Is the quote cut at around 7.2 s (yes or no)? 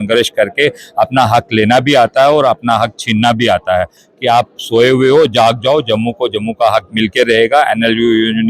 no